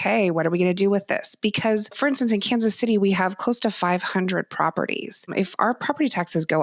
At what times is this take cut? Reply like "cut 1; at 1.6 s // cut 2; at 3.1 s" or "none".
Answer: cut 1; at 1.9 s // cut 2; at 5.3 s